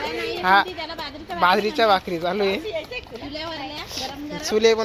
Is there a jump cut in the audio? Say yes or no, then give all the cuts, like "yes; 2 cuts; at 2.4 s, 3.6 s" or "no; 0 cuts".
no; 0 cuts